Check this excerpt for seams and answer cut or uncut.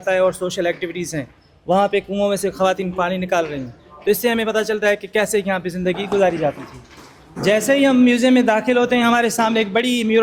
uncut